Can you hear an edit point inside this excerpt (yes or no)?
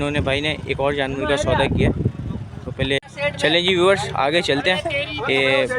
yes